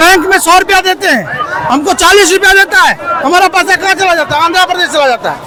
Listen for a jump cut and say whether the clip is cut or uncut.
uncut